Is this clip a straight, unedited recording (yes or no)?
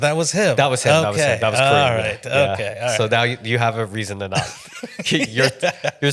yes